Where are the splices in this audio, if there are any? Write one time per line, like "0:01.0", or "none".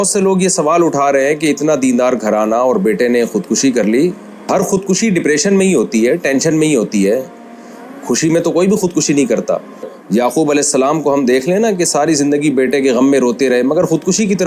0:04.5
0:10.0